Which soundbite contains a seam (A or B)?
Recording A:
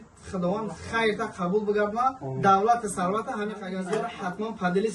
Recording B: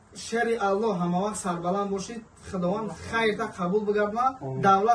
A